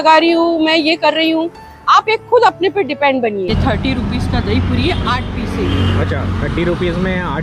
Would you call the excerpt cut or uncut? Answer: cut